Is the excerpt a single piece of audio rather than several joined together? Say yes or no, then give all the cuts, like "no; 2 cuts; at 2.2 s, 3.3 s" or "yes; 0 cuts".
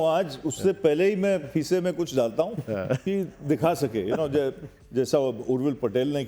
yes; 0 cuts